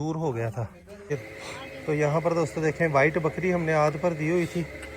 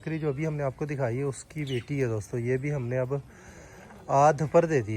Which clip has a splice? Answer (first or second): first